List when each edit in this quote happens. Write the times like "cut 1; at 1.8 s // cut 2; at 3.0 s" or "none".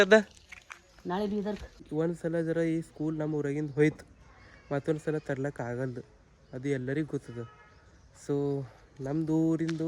cut 1; at 1.9 s